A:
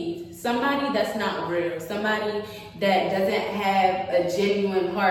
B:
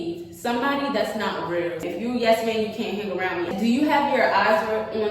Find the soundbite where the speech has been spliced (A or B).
B